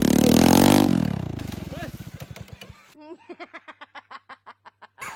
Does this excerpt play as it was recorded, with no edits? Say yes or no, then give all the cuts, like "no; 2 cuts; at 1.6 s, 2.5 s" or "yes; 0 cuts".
yes; 0 cuts